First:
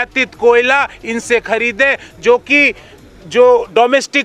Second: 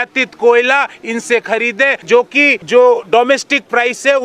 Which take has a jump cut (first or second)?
second